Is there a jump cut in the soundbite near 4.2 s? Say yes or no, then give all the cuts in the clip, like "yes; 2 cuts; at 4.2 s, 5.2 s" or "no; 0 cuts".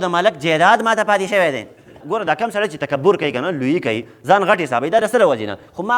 no; 1 cut; at 2.0 s